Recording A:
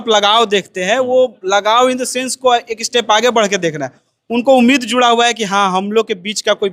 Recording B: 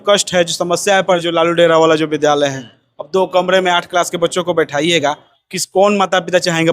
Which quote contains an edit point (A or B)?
B